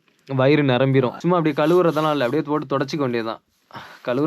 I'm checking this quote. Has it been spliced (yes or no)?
yes